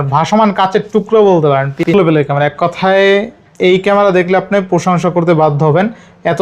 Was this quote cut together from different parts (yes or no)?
yes